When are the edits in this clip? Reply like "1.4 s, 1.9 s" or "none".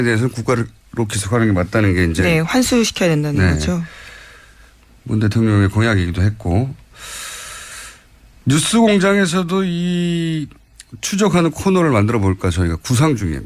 11.9 s